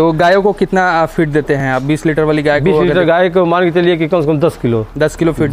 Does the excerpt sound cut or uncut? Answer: uncut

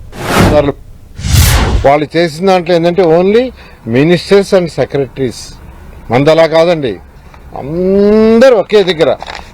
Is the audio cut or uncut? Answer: cut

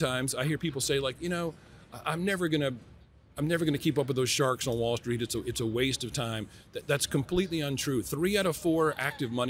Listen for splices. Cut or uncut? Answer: uncut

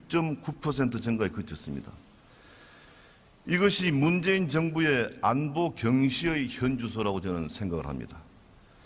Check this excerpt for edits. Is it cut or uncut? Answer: uncut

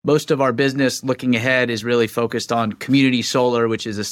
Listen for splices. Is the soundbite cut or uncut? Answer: uncut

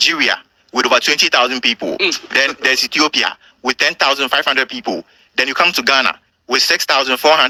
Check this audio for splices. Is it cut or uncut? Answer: uncut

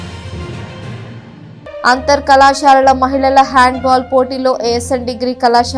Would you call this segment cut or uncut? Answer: cut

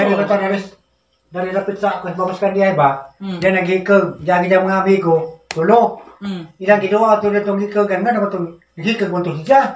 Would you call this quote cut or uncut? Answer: cut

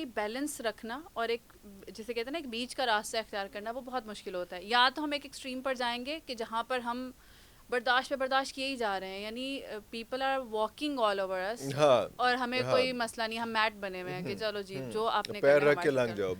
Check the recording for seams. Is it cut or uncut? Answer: uncut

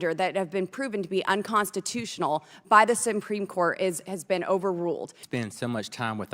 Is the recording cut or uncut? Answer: cut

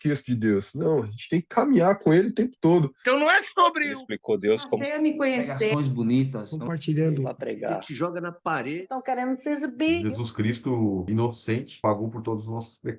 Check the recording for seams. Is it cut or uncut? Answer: cut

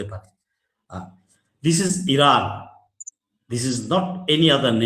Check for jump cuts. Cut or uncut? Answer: uncut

